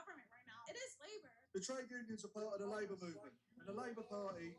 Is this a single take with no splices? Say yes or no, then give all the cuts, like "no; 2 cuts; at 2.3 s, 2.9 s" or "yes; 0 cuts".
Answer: no; 1 cut; at 0.9 s